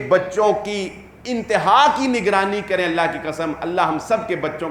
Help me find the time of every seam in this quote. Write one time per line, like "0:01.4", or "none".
none